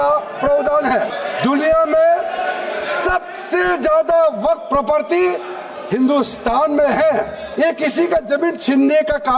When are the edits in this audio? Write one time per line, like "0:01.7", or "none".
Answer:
0:01.1
0:07.4